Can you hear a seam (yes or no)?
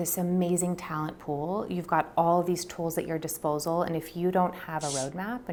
no